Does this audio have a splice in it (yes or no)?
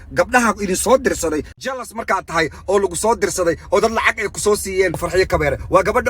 yes